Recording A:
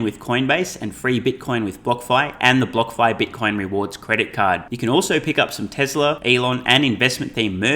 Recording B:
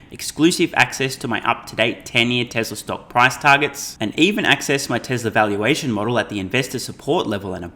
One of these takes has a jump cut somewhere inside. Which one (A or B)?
A